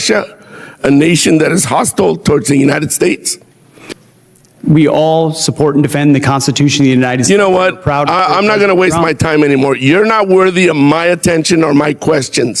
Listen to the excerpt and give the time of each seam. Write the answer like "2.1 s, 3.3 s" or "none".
3.9 s